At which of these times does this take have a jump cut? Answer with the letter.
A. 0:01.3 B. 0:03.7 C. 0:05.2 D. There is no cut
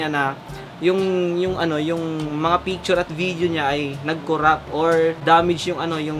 C